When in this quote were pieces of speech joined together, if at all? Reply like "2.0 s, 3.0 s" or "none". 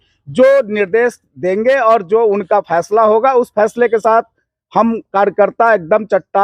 none